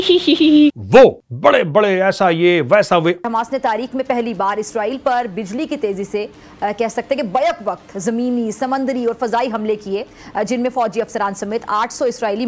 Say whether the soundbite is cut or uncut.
uncut